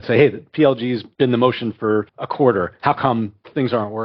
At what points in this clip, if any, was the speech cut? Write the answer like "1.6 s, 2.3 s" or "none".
1.1 s, 2.2 s